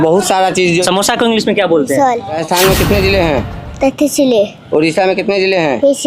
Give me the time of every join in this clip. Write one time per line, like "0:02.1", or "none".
0:02.4

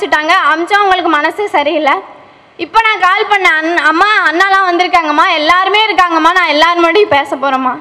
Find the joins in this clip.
none

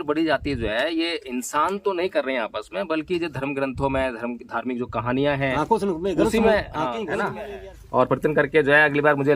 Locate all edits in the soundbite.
0:07.4

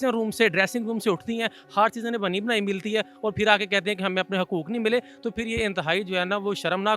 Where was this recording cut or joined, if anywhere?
none

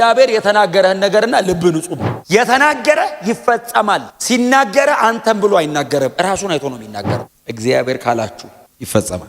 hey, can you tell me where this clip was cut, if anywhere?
0:07.1

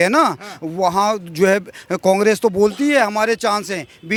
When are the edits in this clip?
none

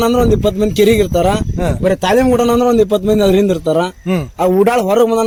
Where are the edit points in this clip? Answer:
none

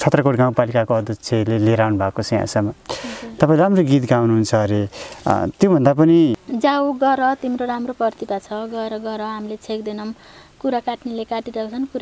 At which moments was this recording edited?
0:06.4

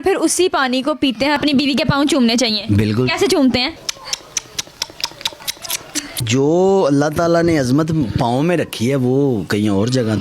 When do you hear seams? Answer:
0:01.4
0:06.1

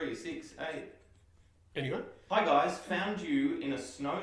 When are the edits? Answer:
0:02.1

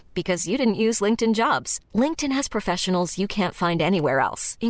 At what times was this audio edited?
none

